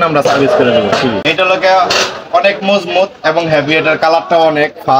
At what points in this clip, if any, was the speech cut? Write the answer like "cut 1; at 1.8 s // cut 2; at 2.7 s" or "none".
cut 1; at 1.2 s